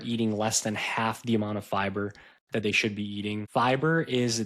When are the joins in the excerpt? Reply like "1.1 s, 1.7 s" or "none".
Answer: 3.5 s

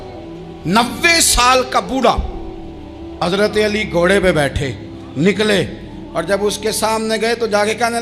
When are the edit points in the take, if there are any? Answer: 3.2 s

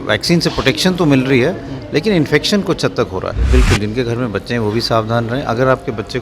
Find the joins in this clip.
3.3 s

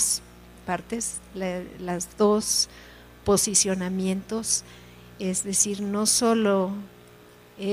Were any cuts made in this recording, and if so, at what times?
none

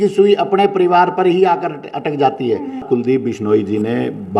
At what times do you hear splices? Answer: 2.8 s

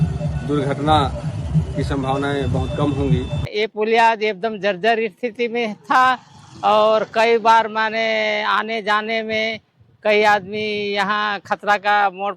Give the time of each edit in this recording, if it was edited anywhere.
3.4 s

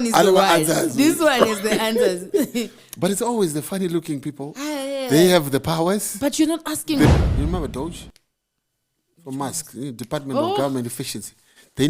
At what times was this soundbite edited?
7.1 s

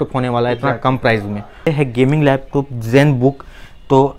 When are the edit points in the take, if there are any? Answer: 1.7 s

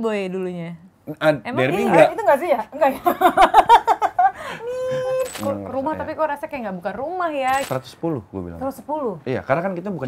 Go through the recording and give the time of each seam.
5.3 s, 7.7 s

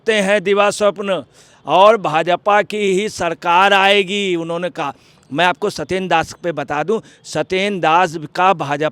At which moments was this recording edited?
none

